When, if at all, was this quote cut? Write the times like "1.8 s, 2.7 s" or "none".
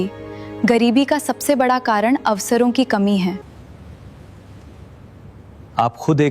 3.4 s